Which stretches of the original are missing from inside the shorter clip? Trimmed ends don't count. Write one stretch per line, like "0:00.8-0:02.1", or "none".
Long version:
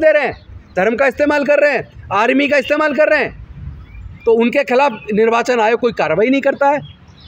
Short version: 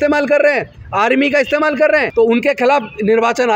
0:03.3-0:04.2